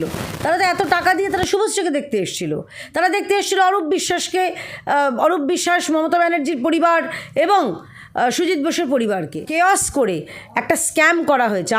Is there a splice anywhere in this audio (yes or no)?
yes